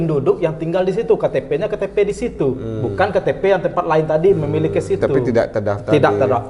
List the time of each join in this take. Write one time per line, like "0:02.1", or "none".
0:05.2

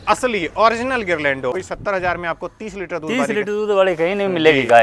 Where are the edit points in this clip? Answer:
0:01.6

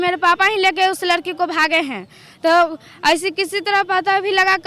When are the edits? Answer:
none

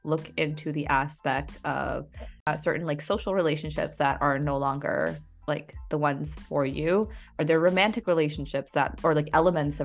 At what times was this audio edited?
0:02.5

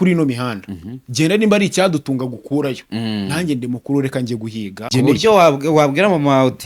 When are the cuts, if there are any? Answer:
0:04.9

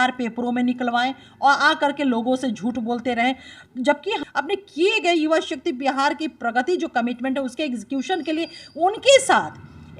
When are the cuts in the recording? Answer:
0:04.2

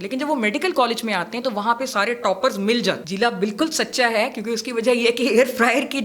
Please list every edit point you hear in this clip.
0:03.1

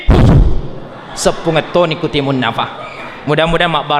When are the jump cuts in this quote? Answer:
none

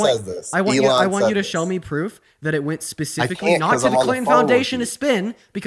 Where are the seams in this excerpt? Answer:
none

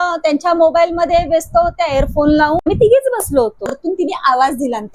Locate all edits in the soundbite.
0:02.6
0:03.8

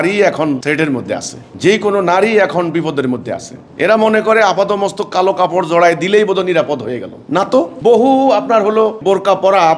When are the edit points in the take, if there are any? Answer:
none

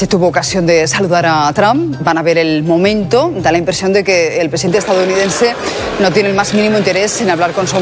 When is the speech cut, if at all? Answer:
none

